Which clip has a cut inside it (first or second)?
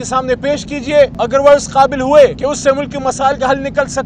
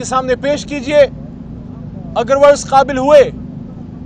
first